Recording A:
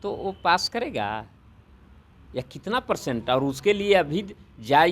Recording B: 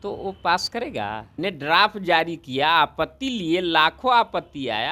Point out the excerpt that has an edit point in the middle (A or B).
B